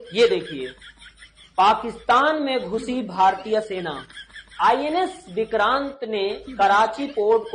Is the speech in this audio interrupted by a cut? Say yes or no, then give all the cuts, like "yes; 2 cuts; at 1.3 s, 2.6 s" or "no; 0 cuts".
no; 0 cuts